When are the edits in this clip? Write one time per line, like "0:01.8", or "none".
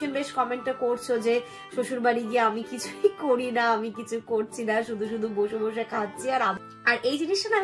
0:06.6